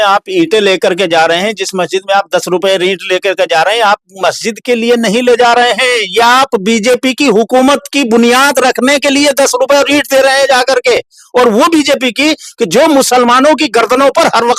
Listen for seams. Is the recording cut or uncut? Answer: uncut